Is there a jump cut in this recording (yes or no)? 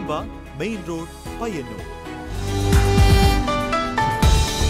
yes